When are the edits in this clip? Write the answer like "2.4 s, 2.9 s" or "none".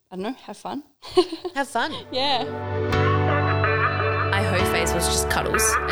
2.5 s